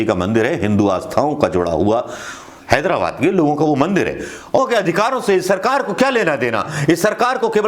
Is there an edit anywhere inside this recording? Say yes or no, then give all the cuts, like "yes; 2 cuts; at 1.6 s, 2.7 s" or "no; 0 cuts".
yes; 1 cut; at 4.6 s